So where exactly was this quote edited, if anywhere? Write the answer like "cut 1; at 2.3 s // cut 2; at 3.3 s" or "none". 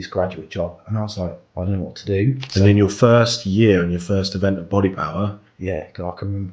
cut 1; at 1.4 s // cut 2; at 2.4 s